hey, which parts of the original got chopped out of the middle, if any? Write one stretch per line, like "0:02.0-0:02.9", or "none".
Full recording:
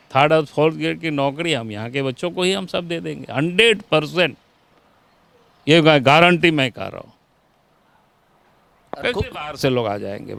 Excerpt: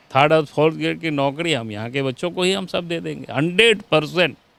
none